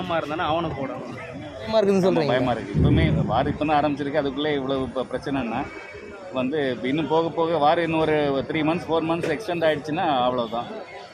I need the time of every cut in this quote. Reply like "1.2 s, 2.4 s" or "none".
1.7 s